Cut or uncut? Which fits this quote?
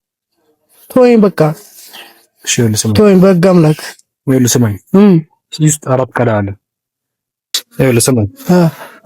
cut